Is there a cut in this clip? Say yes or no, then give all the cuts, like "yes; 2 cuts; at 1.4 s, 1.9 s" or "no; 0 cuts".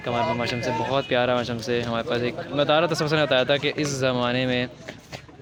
no; 0 cuts